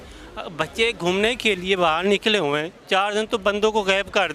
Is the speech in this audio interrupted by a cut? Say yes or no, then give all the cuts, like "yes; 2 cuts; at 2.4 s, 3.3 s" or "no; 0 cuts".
yes; 1 cut; at 2.7 s